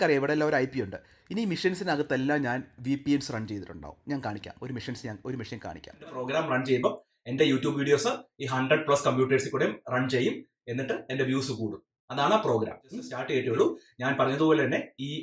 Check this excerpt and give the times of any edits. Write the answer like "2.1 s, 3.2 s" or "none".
6.2 s, 13.1 s

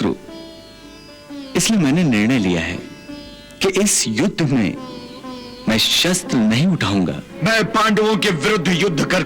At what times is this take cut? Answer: 7.3 s

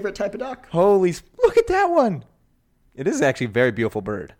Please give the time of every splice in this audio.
none

